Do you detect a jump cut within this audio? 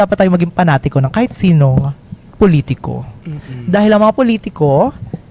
no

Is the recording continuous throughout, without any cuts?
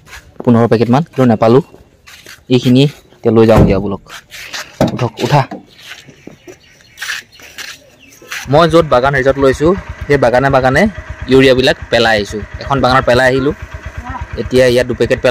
yes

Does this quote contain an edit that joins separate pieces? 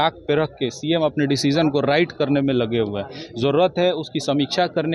no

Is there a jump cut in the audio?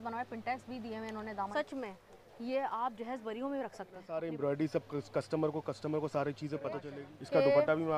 yes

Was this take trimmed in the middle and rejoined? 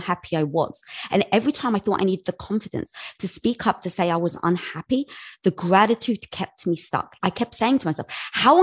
yes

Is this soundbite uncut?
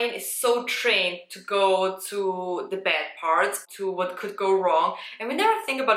yes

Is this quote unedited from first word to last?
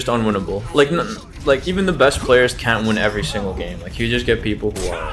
no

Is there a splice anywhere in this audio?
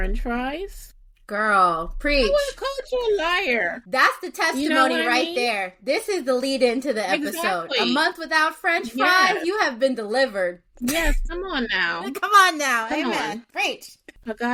no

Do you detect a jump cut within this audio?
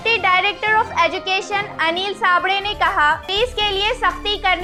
no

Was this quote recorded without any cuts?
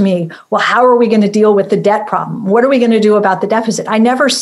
yes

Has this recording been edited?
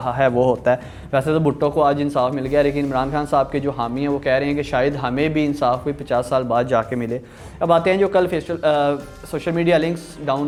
no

